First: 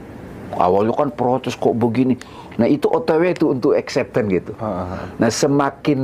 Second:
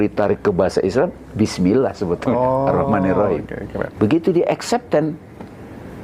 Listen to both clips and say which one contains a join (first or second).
second